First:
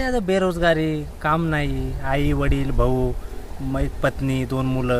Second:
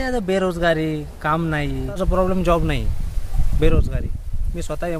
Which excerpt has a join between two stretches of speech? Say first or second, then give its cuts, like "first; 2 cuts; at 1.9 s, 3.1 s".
second; 1 cut; at 2.0 s